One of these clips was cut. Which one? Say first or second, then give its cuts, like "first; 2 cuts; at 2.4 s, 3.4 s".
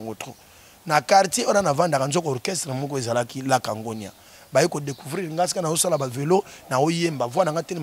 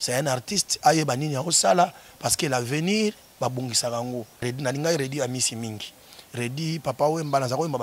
second; 1 cut; at 4.4 s